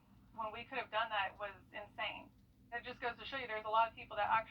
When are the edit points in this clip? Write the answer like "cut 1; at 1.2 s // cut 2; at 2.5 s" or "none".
cut 1; at 2.5 s